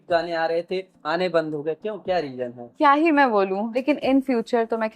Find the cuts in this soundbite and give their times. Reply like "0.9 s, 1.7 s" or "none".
0.9 s, 2.6 s, 3.8 s